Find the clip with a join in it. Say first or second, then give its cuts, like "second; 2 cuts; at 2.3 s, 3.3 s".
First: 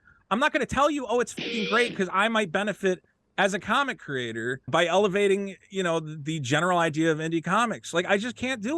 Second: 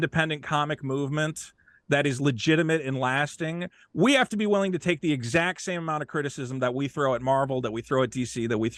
first; 1 cut; at 4.7 s